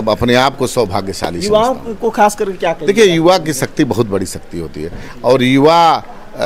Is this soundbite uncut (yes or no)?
yes